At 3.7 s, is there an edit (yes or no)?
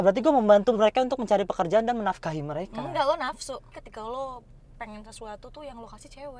yes